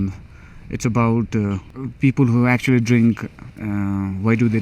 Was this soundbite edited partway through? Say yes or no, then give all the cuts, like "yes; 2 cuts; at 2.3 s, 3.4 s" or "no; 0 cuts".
yes; 1 cut; at 1.6 s